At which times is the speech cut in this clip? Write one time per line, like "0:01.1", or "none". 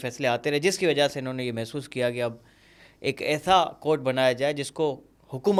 none